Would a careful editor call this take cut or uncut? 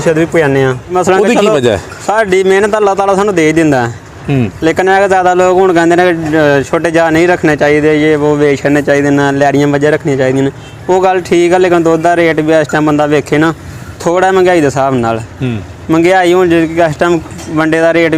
cut